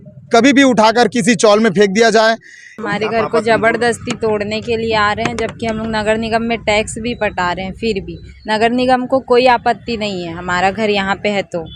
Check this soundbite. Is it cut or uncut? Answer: cut